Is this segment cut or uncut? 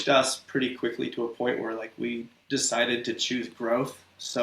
cut